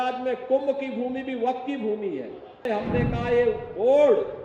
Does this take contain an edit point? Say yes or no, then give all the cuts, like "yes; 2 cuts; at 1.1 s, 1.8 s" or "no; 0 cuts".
yes; 1 cut; at 2.7 s